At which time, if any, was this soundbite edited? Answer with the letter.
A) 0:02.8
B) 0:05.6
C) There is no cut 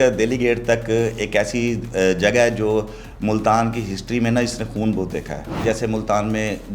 B